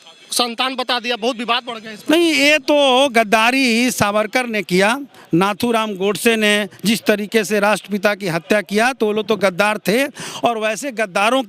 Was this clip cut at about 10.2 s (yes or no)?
no